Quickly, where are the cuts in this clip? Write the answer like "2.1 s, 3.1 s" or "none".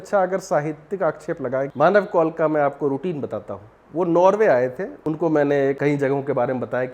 1.7 s, 4.9 s, 5.8 s